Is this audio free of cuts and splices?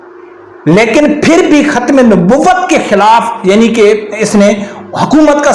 yes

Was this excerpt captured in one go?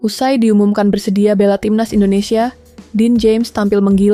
yes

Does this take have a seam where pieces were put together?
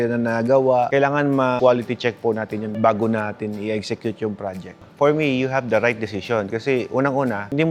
no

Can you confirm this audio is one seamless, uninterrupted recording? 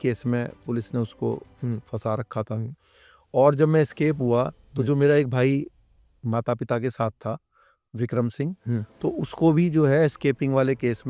yes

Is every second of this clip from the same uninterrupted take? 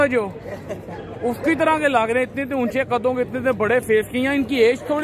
yes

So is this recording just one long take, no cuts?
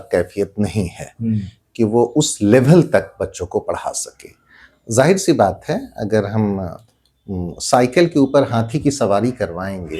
yes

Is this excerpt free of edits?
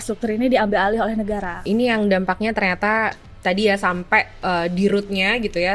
no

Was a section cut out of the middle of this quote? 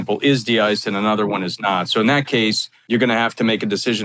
yes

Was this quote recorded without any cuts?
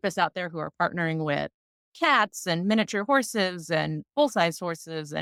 yes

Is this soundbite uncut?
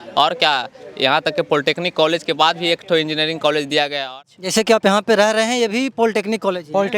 no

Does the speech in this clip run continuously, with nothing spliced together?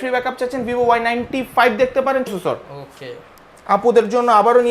no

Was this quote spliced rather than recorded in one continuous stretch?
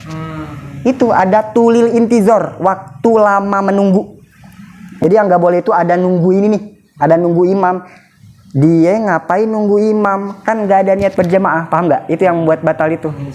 yes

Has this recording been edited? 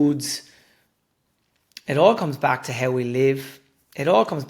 no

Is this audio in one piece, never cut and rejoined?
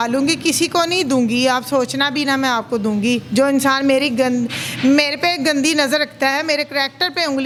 yes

